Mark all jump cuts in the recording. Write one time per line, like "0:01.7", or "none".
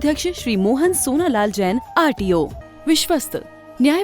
0:02.6